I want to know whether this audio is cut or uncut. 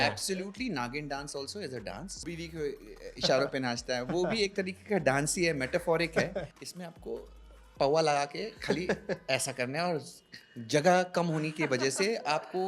cut